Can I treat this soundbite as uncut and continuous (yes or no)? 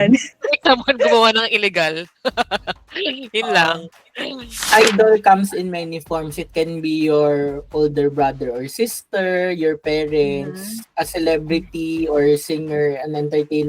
no